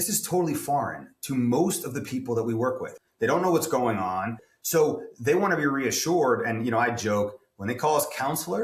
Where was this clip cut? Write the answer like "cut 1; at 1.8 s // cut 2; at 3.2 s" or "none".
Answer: cut 1; at 2.9 s // cut 2; at 4.4 s